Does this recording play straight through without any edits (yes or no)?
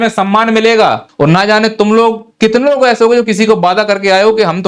no